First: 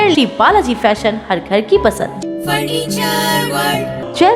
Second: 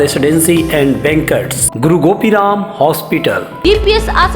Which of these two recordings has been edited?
second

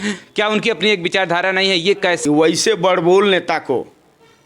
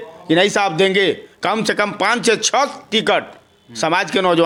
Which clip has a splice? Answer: first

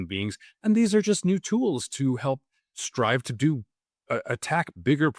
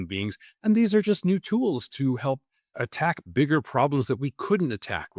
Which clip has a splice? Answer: second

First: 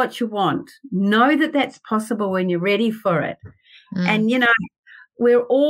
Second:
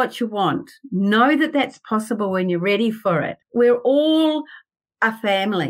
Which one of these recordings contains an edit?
second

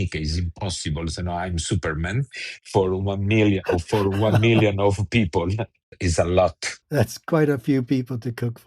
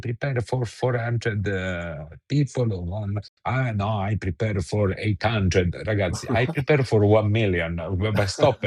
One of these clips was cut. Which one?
first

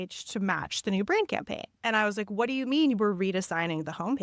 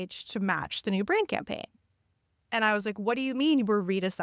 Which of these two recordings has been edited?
first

